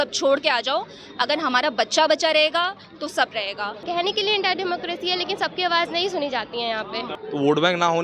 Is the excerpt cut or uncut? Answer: cut